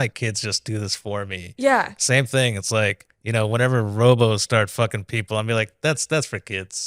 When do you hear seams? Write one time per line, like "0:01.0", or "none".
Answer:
none